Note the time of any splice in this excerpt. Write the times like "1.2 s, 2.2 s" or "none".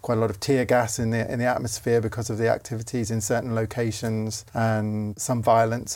4.4 s, 5.2 s

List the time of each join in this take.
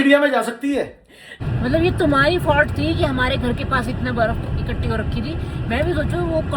1.6 s

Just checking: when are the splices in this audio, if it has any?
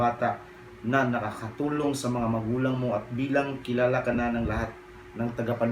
none

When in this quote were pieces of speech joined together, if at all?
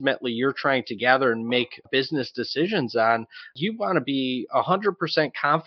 1.9 s

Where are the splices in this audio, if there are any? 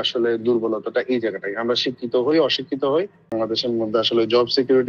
3.3 s

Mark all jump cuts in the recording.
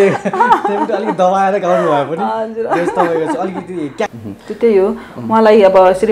4.1 s

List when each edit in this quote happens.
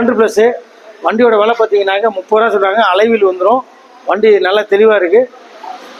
none

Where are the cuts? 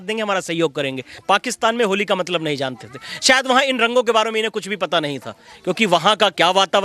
1.1 s

